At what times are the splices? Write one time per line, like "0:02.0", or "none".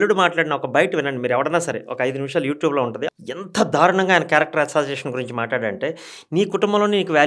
0:03.1